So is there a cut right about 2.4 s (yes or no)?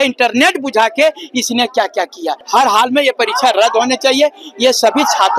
yes